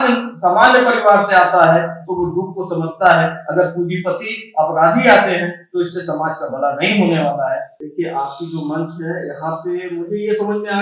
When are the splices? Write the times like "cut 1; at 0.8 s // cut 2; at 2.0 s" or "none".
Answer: cut 1; at 7.7 s

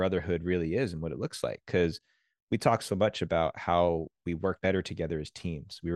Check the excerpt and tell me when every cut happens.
cut 1; at 4.6 s

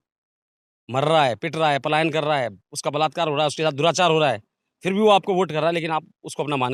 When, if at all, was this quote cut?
none

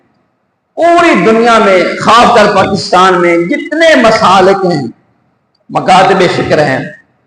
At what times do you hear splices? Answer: none

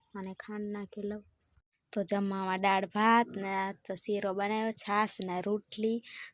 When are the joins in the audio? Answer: cut 1; at 1.7 s

